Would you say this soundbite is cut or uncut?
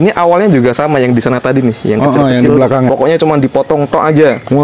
cut